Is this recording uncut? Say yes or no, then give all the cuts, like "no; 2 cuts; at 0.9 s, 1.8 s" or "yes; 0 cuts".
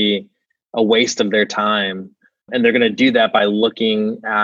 yes; 0 cuts